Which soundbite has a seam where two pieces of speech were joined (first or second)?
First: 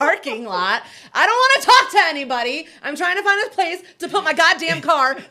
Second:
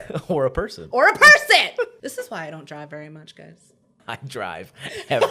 second